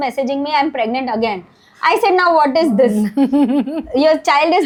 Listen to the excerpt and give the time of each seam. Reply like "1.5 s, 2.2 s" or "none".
none